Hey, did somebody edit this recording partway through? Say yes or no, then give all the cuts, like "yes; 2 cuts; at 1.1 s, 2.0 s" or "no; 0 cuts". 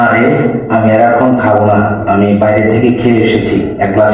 no; 0 cuts